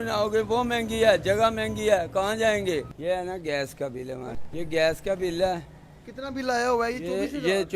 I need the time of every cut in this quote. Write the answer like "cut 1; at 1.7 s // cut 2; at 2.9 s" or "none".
cut 1; at 2.9 s // cut 2; at 4.4 s